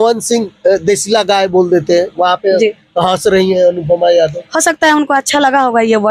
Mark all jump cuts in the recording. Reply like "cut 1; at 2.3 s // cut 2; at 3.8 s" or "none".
none